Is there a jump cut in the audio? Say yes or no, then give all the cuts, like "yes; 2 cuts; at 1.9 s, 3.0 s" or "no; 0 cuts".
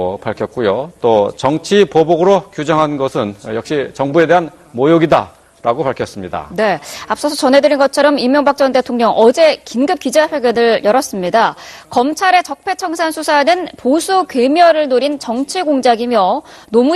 yes; 1 cut; at 8.2 s